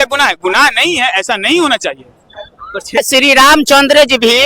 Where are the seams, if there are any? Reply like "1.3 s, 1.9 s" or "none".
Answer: 3.0 s